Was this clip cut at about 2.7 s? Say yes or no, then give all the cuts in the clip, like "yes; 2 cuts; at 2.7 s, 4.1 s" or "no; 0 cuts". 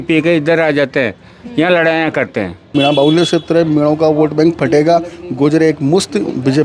yes; 1 cut; at 2.7 s